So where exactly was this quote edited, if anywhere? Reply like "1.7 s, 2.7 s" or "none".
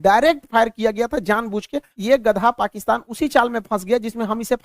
1.8 s